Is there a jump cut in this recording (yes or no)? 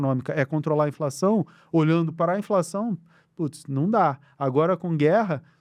no